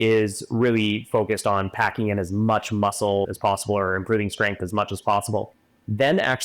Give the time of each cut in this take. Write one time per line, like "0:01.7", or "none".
0:03.3